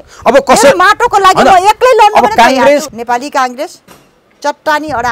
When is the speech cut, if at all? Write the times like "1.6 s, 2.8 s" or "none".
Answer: 2.9 s